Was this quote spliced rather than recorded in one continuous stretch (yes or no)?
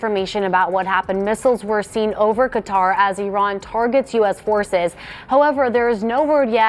no